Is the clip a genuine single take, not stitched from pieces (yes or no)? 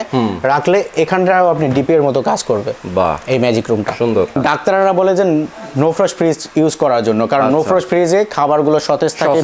no